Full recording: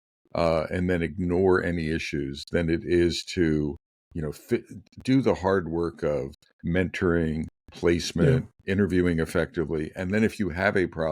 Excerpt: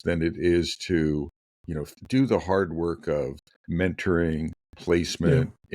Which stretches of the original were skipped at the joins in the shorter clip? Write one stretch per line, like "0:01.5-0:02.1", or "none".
0:04.3-0:04.8